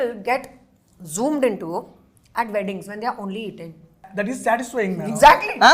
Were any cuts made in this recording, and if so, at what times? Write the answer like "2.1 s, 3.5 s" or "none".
4.1 s